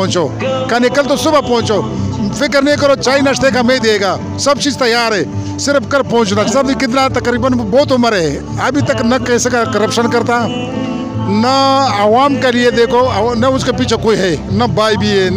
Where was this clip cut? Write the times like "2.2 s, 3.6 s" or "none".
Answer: 6.5 s